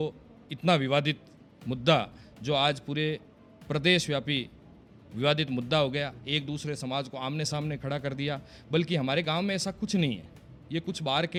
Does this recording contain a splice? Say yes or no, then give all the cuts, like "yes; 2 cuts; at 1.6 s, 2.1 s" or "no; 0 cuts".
no; 0 cuts